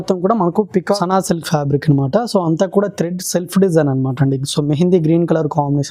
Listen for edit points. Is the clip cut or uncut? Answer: cut